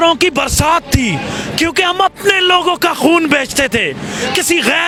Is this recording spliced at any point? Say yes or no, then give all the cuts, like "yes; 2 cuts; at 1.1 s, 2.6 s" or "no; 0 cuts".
no; 0 cuts